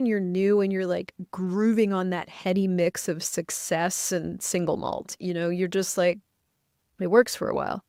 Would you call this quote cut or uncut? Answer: uncut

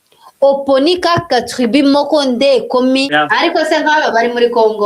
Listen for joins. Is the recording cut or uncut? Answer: cut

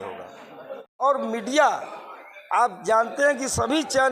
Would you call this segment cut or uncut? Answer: cut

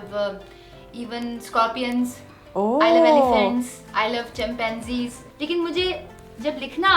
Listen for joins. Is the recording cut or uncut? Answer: cut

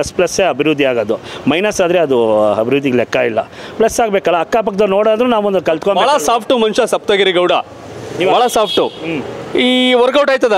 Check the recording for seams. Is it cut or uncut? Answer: uncut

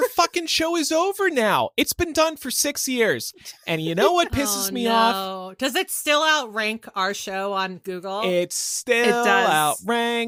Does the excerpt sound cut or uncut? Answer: uncut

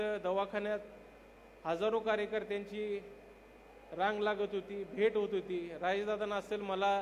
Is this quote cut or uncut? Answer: uncut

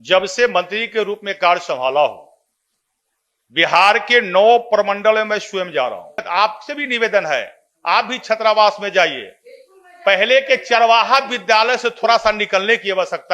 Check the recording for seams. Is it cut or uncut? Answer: cut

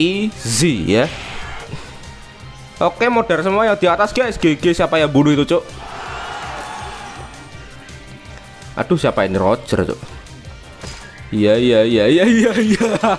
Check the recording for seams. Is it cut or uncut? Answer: cut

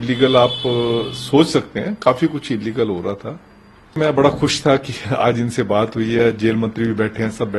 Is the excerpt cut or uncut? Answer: cut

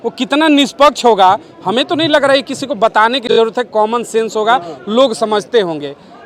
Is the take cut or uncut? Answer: uncut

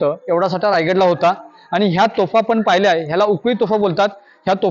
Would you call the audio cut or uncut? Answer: uncut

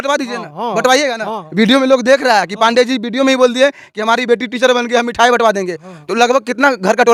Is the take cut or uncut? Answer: uncut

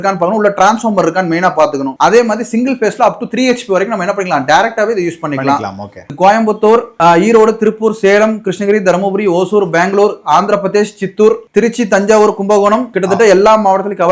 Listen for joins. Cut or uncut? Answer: cut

